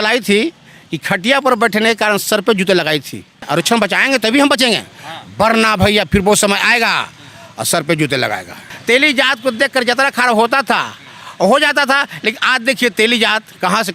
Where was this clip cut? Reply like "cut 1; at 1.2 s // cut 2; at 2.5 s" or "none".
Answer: cut 1; at 3.5 s // cut 2; at 8.7 s